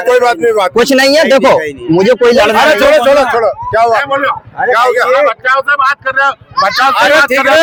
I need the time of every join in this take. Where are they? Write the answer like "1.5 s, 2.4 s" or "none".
none

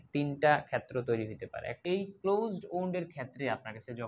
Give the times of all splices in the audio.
1.7 s

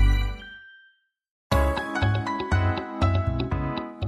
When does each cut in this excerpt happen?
1.4 s

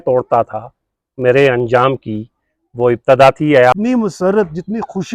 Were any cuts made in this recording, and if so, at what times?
3.7 s

